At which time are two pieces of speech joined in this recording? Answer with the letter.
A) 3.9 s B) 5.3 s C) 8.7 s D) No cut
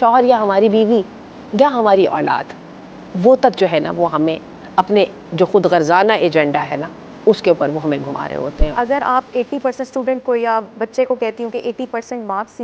C